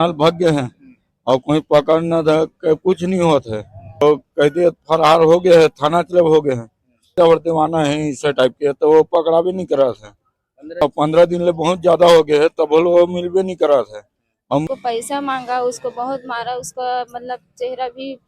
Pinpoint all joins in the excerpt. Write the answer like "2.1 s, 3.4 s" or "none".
4.0 s, 7.1 s, 10.8 s, 14.7 s